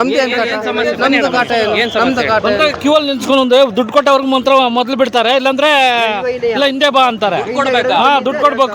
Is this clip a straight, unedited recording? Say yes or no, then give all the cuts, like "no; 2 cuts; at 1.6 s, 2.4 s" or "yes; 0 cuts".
yes; 0 cuts